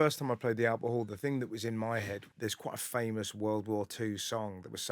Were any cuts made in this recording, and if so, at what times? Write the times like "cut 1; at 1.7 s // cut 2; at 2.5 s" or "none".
cut 1; at 2.2 s

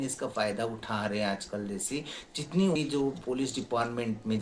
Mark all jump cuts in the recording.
cut 1; at 2.7 s

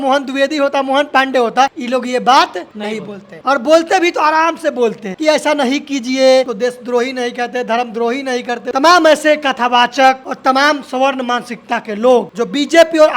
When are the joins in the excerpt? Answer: cut 1; at 1.8 s // cut 2; at 2.9 s // cut 3; at 5.1 s // cut 4; at 6.5 s // cut 5; at 8.6 s // cut 6; at 10.3 s // cut 7; at 12.3 s

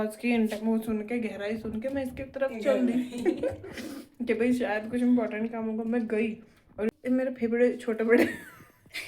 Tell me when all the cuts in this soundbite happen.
cut 1; at 7.0 s

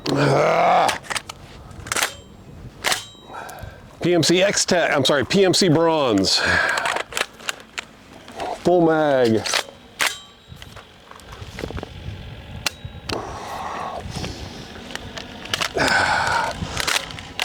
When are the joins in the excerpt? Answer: cut 1; at 3.8 s

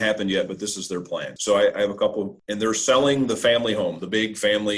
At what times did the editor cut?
cut 1; at 1.3 s // cut 2; at 2.3 s

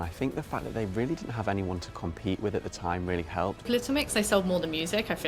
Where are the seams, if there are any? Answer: cut 1; at 3.7 s

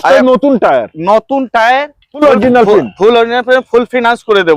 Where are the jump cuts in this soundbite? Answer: cut 1; at 2.2 s

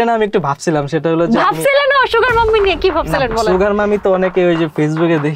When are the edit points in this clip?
none

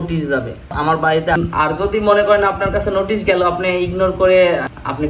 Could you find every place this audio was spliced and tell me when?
cut 1; at 1.4 s

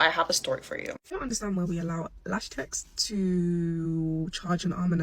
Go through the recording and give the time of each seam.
cut 1; at 1.0 s

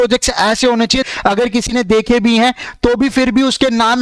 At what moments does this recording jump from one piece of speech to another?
cut 1; at 1.1 s

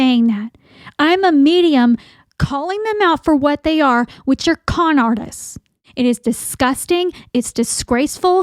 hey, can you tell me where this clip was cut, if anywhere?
cut 1; at 5.8 s

